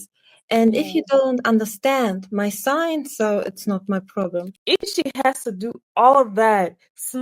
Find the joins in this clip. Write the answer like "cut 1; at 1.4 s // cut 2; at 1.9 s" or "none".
cut 1; at 4.6 s